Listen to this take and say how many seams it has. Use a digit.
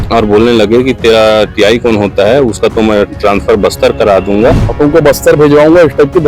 1